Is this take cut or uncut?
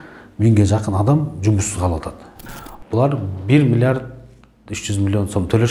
cut